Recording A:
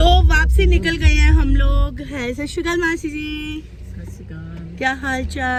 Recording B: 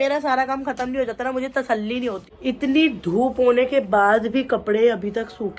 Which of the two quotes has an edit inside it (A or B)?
B